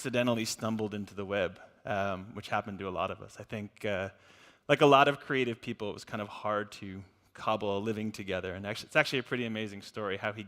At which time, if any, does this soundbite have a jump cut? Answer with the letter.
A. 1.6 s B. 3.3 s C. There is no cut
B